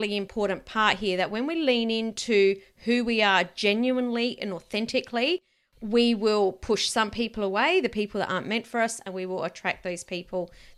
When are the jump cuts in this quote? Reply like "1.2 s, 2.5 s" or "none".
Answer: none